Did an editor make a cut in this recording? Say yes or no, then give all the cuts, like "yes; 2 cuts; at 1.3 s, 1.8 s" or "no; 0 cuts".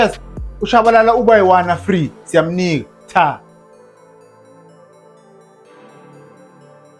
no; 0 cuts